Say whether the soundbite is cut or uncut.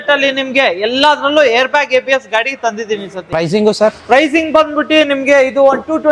cut